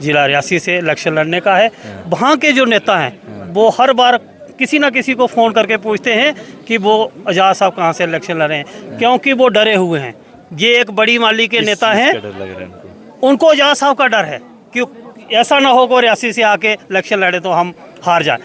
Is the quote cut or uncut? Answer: uncut